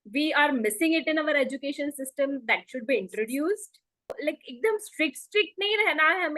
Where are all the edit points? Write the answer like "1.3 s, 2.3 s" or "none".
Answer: 4.1 s